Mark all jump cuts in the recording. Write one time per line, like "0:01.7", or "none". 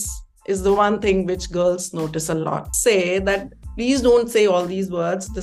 0:02.7